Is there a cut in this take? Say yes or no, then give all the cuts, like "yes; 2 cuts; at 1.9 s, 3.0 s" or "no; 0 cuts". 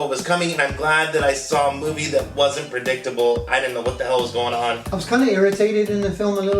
yes; 1 cut; at 5.0 s